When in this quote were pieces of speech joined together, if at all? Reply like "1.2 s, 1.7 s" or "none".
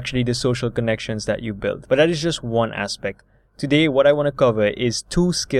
1.8 s